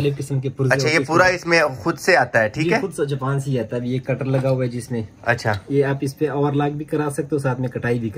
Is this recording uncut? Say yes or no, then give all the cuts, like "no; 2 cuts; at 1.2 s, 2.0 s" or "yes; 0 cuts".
yes; 0 cuts